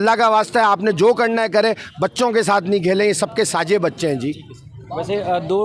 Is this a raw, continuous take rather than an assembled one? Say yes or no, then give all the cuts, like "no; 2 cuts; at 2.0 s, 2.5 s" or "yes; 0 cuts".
yes; 0 cuts